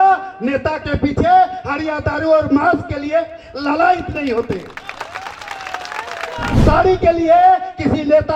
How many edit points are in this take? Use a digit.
1